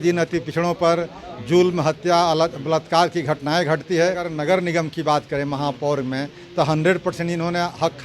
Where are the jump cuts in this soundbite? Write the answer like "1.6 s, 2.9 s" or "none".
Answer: 4.3 s